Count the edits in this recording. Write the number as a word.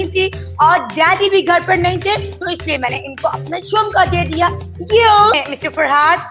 one